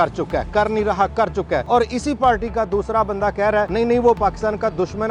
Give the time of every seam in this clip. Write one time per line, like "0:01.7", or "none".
0:01.6
0:03.7